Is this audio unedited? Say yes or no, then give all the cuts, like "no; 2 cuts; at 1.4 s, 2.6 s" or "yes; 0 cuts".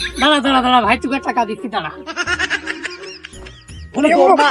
yes; 0 cuts